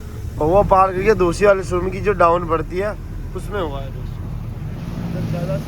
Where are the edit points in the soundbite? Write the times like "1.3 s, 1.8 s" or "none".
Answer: none